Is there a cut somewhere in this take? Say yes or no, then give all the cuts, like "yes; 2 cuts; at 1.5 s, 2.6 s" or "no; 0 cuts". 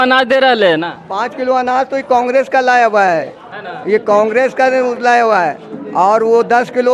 no; 0 cuts